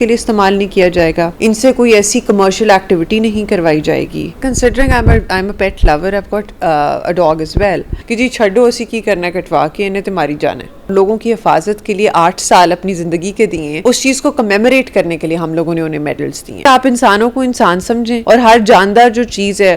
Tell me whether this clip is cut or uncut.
cut